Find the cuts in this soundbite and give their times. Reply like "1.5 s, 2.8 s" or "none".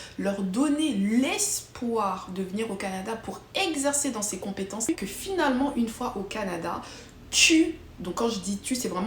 4.9 s